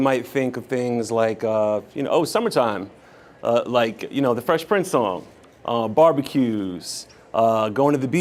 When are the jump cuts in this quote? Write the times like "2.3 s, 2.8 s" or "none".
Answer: none